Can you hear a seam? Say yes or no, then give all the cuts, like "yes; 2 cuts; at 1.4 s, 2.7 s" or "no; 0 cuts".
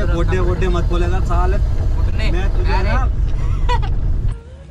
no; 0 cuts